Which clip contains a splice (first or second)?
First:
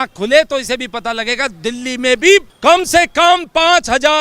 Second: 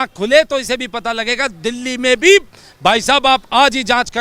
first